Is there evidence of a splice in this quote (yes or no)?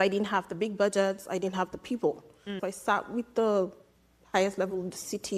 yes